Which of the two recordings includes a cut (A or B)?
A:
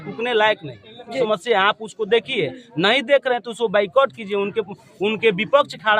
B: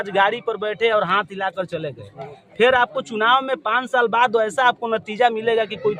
A